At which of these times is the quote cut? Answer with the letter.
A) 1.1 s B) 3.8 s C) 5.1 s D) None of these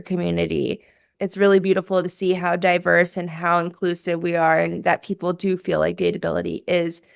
A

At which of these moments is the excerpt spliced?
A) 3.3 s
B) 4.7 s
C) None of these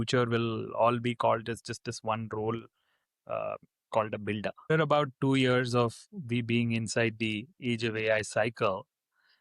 B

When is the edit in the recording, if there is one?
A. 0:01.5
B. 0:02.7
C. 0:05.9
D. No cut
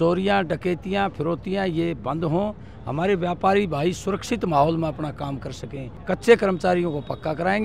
C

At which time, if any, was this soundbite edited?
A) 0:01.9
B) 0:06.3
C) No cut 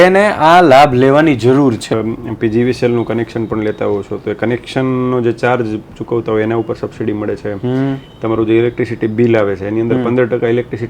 A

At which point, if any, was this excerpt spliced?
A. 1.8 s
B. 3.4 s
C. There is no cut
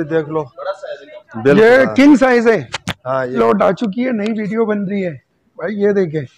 B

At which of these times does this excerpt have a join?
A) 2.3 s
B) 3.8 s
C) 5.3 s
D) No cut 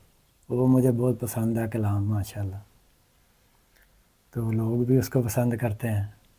D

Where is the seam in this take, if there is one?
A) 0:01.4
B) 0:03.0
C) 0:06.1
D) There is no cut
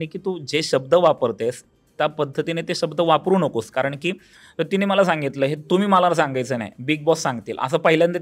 D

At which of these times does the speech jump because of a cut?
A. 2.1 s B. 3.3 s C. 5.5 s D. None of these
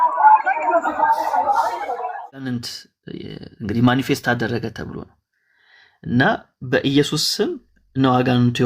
A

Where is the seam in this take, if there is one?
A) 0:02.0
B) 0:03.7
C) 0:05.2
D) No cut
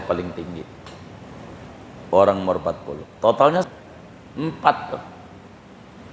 B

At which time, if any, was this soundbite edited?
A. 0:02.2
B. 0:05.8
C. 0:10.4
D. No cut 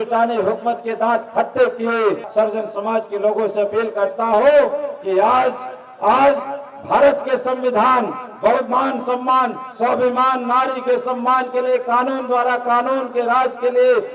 A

